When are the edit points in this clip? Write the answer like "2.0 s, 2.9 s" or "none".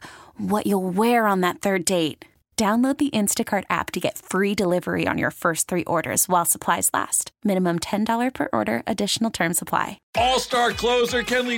10.0 s